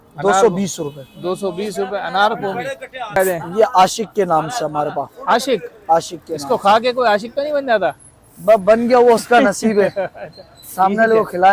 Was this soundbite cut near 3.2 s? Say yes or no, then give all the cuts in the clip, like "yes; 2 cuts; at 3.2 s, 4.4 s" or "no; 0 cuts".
yes; 1 cut; at 3.2 s